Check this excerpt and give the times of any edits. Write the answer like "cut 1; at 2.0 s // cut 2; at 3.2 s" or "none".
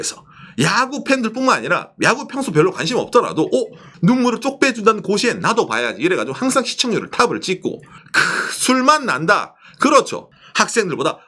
cut 1; at 3.9 s // cut 2; at 7.9 s // cut 3; at 10.2 s